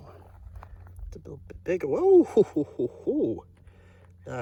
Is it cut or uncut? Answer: uncut